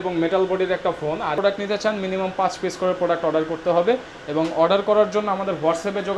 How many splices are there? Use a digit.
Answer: 1